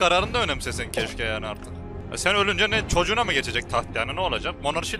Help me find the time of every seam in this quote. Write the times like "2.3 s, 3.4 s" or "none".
2.0 s